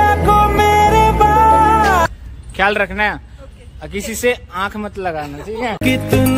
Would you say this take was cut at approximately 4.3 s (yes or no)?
no